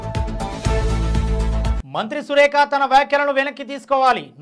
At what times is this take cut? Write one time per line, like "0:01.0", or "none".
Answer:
0:01.7